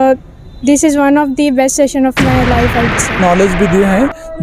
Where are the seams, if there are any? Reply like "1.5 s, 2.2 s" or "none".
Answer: 3.2 s